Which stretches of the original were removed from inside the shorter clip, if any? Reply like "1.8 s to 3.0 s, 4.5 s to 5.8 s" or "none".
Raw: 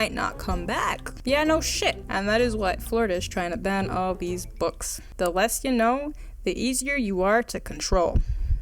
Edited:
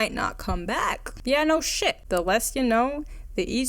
2.0 s to 5.1 s

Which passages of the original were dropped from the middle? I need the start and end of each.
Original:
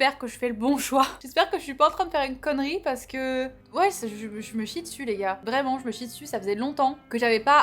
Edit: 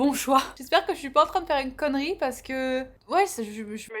none

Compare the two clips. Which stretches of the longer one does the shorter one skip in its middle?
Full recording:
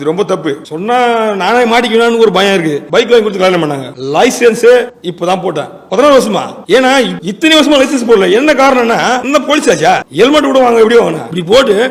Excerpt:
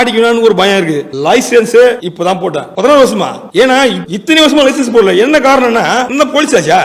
2.8 s to 3.9 s, 5.2 s to 5.5 s

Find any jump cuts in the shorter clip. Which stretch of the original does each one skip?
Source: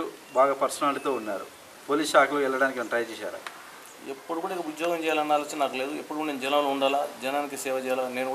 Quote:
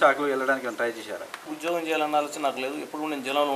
3.6 s to 4.7 s

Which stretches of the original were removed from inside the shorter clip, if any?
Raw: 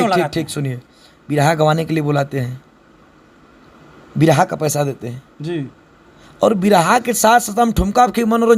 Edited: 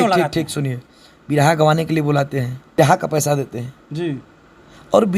2.8 s to 4.3 s

